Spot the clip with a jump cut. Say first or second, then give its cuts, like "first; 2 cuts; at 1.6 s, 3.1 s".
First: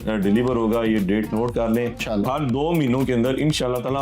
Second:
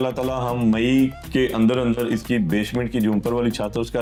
first; 1 cut; at 2.1 s